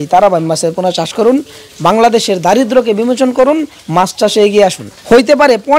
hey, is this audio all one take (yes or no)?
no